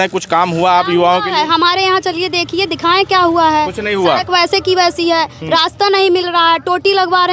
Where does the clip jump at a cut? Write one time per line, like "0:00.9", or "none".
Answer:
none